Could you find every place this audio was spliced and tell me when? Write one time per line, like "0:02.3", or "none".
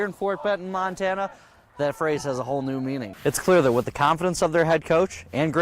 0:03.1